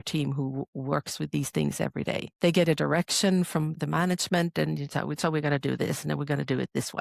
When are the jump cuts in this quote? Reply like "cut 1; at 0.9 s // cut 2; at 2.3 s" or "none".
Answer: cut 1; at 2.3 s // cut 2; at 3.7 s